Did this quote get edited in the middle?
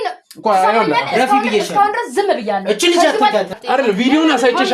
yes; 1 cut; at 3.5 s

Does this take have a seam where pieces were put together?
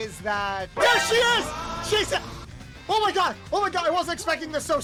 no; 0 cuts

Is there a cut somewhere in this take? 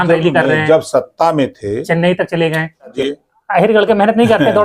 yes; 1 cut; at 3.0 s

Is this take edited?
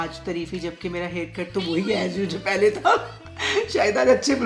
no; 0 cuts

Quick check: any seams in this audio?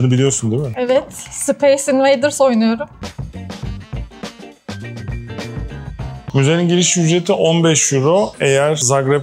no; 0 cuts

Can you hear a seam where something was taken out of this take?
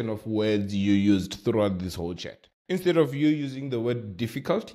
no; 0 cuts

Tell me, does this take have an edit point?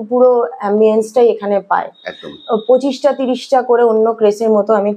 no; 0 cuts

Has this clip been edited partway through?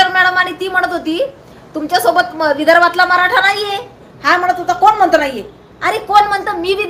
no; 0 cuts

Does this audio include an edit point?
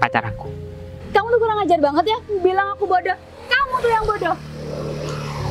yes; 1 cut; at 1.0 s

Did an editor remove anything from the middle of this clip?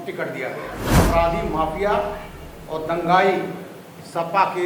yes; 1 cut; at 1.0 s

